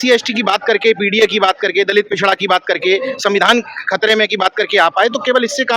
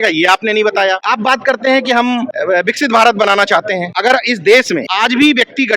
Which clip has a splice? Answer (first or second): second